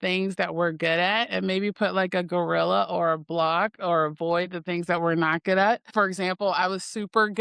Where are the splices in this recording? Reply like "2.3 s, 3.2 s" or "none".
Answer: 5.9 s